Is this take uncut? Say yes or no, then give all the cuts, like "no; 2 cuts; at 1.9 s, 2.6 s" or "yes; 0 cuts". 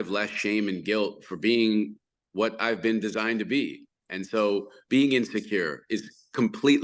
yes; 0 cuts